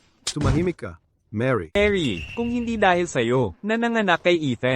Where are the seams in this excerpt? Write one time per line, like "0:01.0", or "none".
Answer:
0:01.8